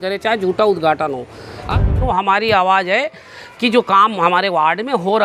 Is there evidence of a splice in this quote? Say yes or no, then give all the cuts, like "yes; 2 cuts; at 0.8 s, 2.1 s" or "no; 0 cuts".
yes; 1 cut; at 1.8 s